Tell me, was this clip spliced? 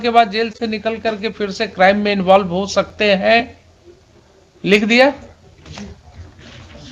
no; 0 cuts

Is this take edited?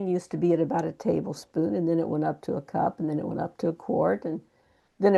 no; 0 cuts

